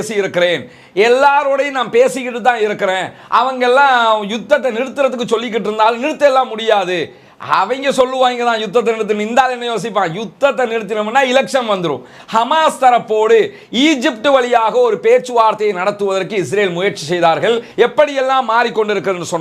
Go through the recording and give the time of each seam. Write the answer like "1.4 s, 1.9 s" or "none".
12.1 s, 17.7 s